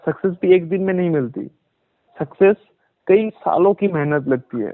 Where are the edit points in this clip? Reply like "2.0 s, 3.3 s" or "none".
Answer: none